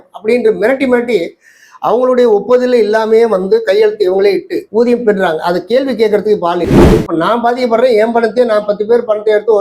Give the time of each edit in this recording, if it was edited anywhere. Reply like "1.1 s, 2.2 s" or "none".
6.9 s